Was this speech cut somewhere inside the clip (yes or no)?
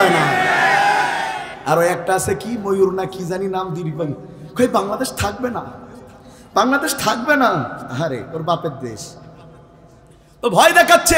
yes